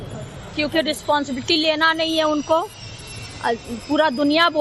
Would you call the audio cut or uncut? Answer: cut